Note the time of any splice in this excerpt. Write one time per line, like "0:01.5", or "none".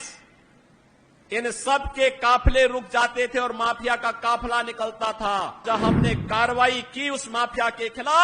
0:05.6